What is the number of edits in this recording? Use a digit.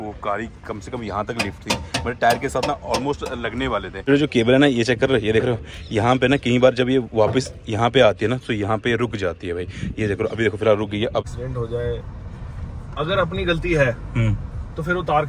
2